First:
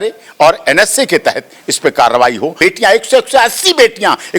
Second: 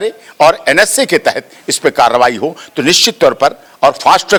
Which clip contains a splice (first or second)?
first